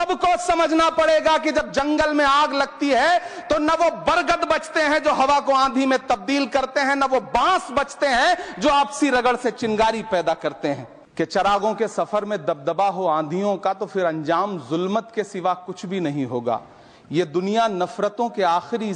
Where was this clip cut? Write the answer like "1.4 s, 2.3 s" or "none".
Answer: 11.0 s